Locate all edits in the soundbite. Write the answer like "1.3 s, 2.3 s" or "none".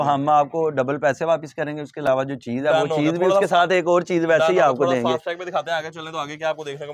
none